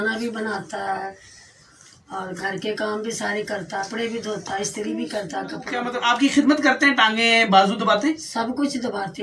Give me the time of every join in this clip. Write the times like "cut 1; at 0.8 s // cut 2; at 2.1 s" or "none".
cut 1; at 3.9 s // cut 2; at 5.8 s